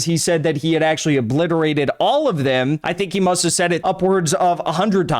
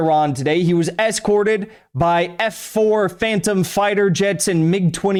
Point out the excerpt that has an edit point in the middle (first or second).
first